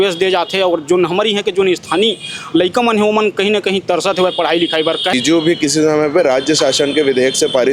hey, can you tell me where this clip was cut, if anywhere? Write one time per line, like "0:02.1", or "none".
0:05.1